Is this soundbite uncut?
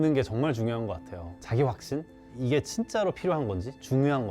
no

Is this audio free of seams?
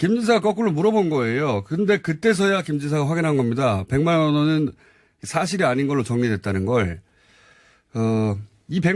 no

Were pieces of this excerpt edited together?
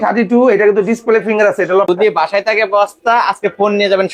yes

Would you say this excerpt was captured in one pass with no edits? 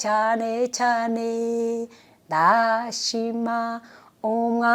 yes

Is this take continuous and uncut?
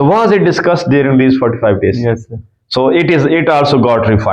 yes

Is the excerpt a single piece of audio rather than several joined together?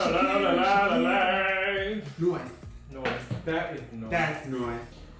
yes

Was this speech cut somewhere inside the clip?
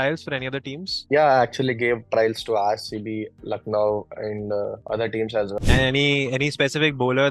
yes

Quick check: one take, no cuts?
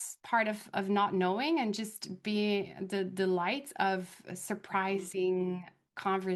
yes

